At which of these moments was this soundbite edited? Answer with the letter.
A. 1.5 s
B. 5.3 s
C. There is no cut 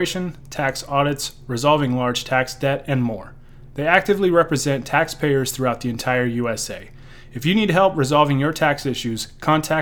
C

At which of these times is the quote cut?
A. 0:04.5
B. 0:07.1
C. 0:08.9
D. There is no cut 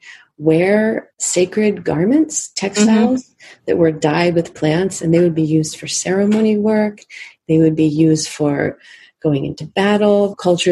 D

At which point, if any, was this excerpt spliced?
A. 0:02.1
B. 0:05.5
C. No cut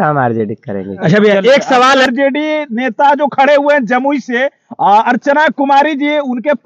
A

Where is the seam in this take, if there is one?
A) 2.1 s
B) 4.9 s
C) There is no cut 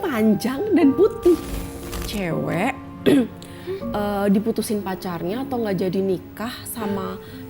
A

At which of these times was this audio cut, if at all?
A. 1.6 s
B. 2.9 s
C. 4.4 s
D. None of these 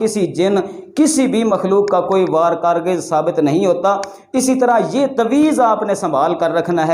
D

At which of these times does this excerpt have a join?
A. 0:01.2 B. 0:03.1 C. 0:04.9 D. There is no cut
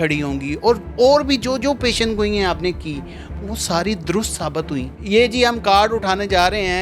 C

